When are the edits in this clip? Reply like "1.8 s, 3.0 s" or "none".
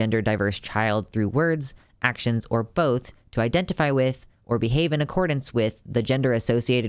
none